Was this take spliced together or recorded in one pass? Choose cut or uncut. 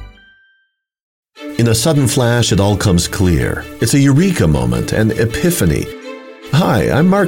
cut